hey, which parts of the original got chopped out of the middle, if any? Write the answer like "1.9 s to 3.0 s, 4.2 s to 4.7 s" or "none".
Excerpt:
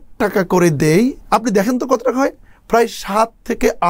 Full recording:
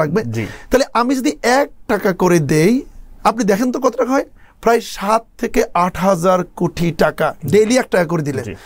2.9 s to 3.1 s